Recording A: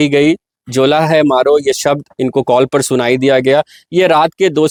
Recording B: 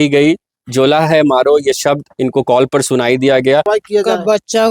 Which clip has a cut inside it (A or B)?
B